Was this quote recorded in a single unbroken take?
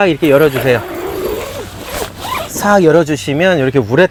yes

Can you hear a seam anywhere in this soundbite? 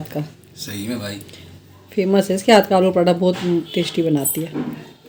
no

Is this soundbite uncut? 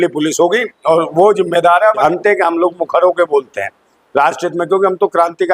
no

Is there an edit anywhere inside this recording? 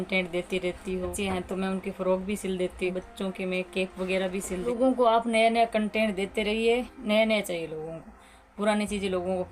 yes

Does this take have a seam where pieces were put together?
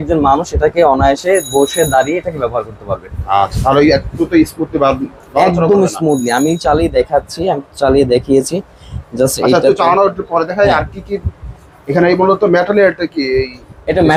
no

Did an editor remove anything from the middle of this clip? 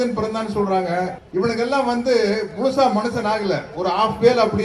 yes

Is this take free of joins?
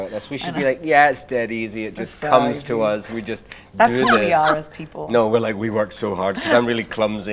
yes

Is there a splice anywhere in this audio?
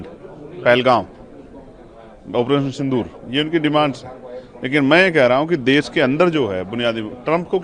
no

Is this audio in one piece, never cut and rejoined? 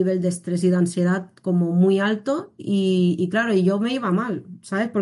yes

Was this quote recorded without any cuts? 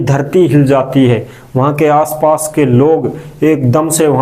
yes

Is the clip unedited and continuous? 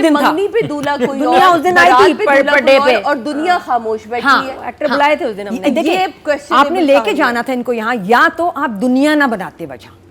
yes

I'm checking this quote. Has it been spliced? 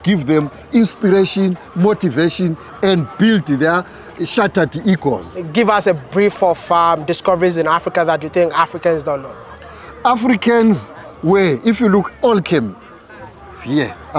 no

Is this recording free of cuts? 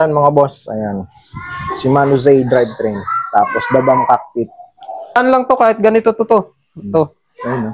no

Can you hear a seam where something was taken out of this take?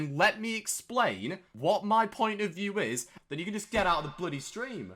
yes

